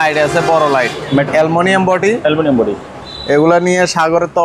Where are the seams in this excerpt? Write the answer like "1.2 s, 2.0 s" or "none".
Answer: 1.3 s